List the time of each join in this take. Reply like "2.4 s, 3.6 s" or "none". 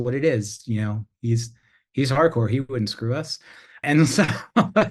3.8 s